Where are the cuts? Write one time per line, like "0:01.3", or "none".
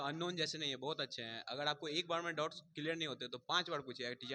none